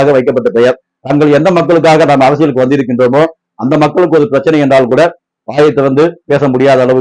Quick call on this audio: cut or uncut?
cut